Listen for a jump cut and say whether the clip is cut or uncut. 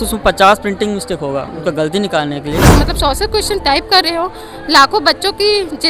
cut